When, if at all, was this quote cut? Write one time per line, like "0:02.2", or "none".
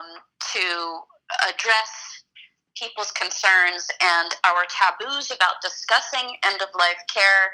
none